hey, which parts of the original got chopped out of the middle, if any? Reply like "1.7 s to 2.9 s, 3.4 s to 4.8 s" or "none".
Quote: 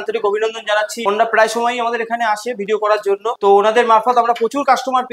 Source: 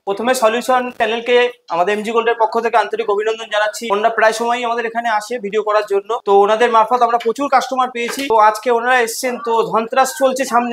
none